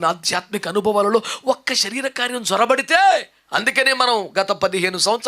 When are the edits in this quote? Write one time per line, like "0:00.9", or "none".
0:03.4